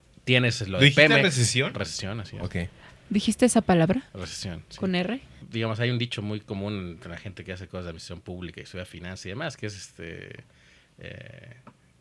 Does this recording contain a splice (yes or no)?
yes